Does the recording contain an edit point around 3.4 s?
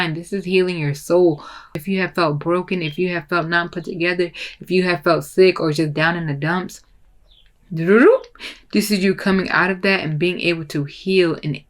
no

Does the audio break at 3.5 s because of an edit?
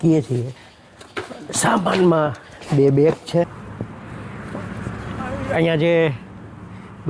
yes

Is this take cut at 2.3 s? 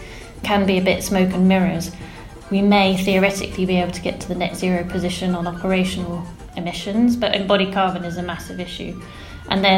yes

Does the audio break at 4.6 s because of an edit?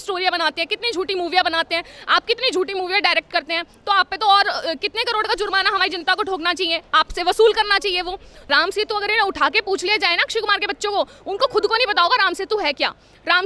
no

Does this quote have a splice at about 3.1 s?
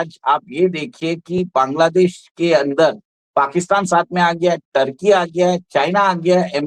no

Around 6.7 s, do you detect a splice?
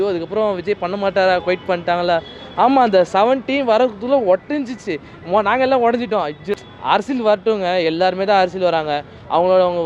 yes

